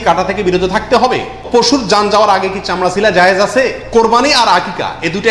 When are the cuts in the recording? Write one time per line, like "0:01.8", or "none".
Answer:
0:01.5
0:03.8